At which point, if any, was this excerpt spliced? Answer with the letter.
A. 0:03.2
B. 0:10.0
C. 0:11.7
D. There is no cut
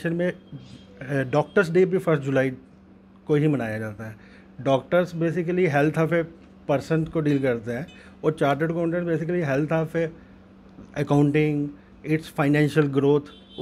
D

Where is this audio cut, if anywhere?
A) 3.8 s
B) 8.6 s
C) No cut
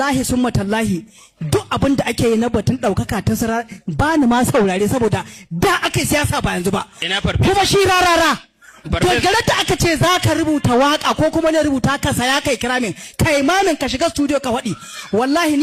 C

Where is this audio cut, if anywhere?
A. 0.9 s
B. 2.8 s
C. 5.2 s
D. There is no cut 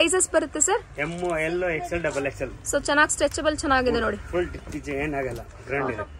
D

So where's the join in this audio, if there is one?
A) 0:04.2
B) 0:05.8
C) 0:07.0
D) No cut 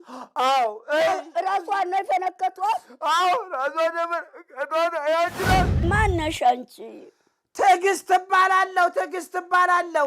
B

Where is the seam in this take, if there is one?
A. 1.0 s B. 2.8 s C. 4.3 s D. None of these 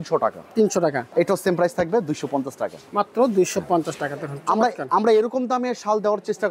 A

